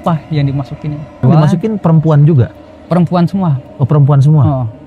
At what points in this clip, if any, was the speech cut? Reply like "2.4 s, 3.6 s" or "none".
1.2 s